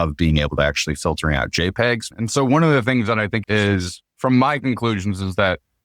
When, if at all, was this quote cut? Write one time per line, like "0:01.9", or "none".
0:02.0
0:03.4